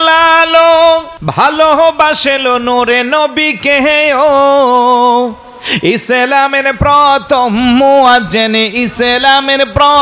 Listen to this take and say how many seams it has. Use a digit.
1